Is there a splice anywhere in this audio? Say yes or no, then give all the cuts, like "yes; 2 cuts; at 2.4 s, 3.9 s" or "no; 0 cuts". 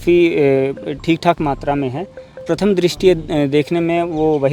yes; 1 cut; at 2.4 s